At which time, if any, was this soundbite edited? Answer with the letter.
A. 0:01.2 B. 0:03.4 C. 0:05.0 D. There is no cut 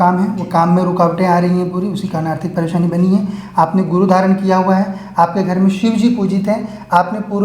D